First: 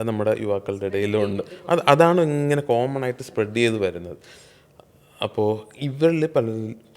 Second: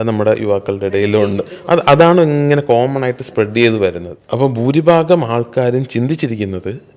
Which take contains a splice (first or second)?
second